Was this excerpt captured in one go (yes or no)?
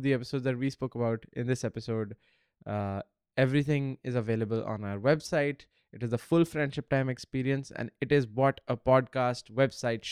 yes